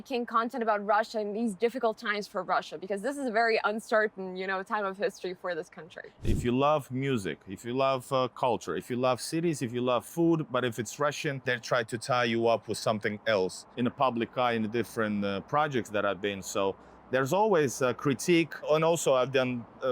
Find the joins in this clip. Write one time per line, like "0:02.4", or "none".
0:06.3
0:11.4
0:13.6
0:18.7